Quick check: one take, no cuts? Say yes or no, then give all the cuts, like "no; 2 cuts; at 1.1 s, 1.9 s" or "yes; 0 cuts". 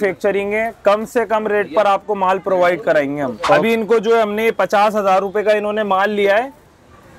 no; 1 cut; at 3.6 s